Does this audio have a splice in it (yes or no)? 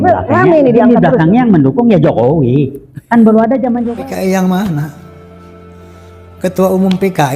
yes